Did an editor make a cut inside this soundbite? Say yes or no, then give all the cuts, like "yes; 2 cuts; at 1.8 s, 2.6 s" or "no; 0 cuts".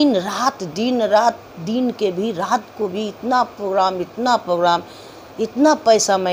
no; 0 cuts